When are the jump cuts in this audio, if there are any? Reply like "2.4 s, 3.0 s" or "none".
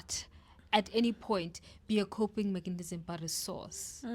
none